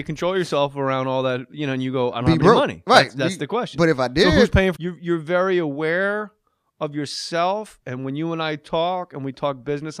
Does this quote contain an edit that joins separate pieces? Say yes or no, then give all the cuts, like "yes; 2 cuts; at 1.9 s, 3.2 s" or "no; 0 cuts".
no; 0 cuts